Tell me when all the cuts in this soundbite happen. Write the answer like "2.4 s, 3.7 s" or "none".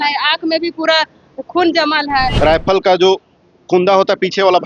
2.3 s